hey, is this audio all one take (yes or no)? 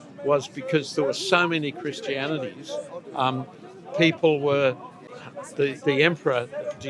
no